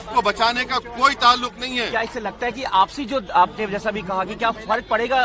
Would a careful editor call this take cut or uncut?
uncut